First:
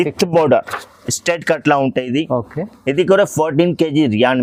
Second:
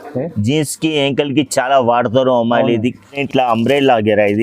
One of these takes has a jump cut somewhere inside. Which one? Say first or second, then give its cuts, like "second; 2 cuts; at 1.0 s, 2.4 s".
second; 1 cut; at 3.1 s